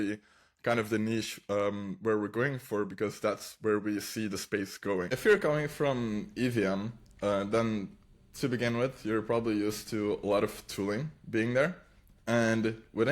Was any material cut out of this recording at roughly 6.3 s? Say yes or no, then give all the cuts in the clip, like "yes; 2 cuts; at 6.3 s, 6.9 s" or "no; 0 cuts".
no; 1 cut; at 5.1 s